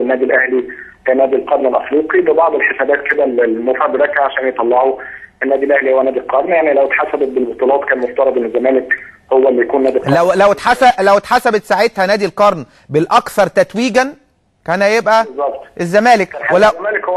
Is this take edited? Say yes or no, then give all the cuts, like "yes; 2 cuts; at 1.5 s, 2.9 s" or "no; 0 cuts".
yes; 1 cut; at 3.8 s